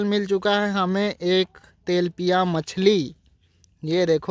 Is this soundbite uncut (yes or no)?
yes